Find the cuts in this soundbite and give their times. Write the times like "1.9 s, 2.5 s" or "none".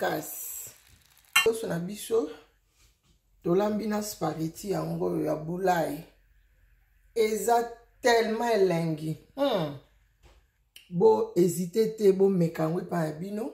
1.4 s